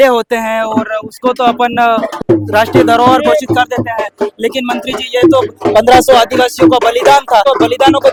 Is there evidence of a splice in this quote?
no; 0 cuts

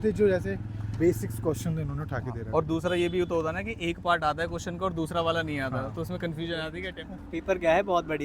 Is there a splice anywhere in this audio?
yes; 1 cut; at 6.8 s

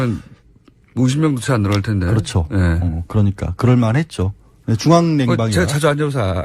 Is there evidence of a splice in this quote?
yes; 1 cut; at 5.3 s

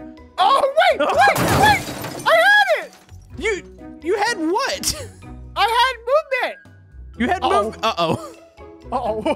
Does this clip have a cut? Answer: no; 0 cuts

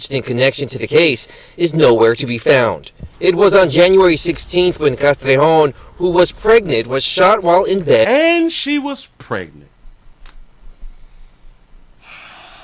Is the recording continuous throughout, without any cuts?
yes; 0 cuts

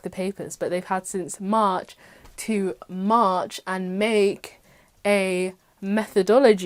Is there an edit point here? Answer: no; 0 cuts

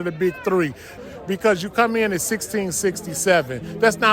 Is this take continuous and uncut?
no; 1 cut; at 1.0 s

